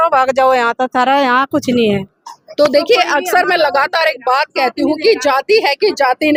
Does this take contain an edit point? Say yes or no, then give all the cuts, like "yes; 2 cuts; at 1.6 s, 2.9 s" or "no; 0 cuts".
no; 0 cuts